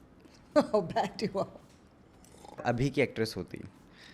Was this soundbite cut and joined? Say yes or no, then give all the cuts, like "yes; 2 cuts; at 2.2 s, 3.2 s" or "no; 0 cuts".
yes; 1 cut; at 2.6 s